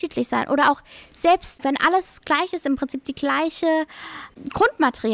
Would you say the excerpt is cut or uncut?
cut